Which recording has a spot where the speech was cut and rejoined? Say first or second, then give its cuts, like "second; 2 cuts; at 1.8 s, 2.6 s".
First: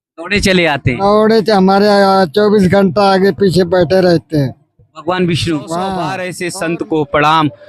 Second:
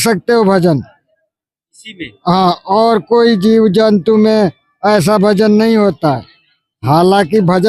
first; 1 cut; at 6.3 s